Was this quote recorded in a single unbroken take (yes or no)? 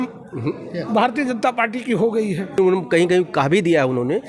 no